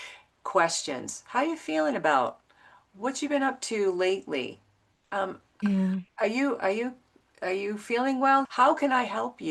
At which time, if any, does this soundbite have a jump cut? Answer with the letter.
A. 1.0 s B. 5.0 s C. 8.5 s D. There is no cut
C